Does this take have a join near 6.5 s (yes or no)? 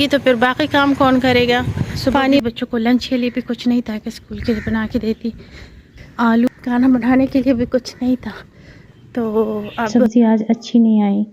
yes